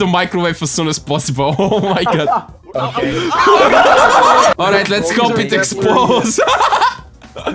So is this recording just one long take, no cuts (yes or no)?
no